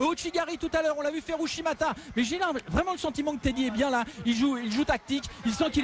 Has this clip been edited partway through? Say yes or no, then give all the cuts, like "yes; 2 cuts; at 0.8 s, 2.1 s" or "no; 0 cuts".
yes; 1 cut; at 1.5 s